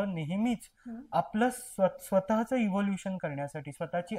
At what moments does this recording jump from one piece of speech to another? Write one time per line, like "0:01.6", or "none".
none